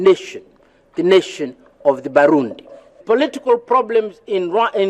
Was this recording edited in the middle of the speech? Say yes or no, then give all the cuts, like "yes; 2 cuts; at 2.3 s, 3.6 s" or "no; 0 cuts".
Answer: yes; 1 cut; at 2.9 s